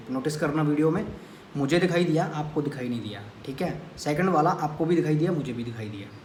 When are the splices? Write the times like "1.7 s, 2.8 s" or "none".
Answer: none